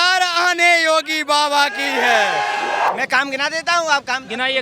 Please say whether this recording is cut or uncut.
cut